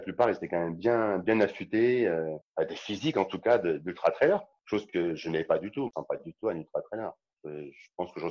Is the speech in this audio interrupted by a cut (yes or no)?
yes